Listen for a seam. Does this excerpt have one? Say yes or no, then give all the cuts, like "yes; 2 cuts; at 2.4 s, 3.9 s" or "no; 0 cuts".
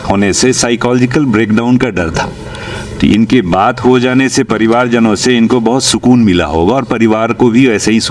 no; 0 cuts